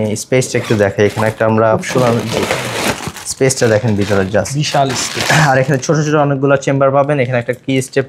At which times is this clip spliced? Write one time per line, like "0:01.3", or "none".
none